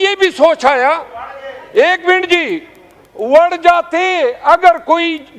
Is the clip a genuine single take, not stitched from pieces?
yes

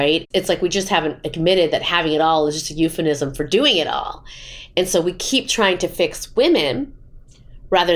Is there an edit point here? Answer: no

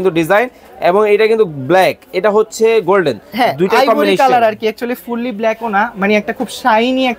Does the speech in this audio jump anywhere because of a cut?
no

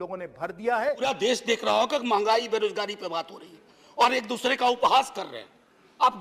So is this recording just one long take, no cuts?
no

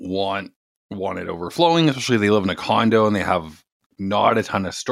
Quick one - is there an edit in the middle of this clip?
no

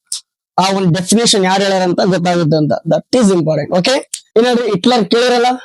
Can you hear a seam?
yes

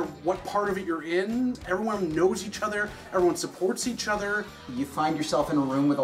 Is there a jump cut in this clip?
yes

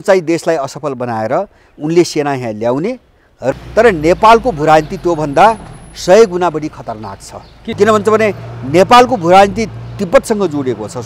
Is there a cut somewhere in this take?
yes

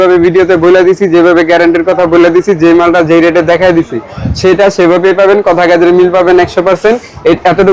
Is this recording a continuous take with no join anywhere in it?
yes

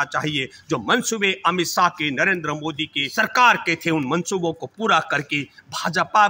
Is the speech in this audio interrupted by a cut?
yes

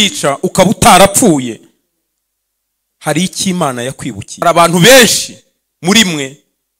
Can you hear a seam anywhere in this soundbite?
yes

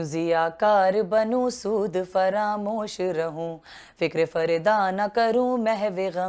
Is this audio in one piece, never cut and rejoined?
yes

